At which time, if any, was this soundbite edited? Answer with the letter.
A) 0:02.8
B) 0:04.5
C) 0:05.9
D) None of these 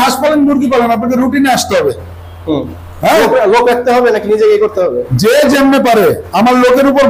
D